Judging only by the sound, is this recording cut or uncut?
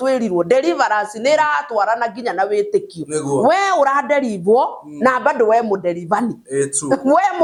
uncut